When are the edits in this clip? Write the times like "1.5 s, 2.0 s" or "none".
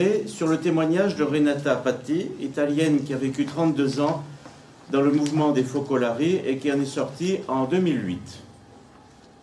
1.8 s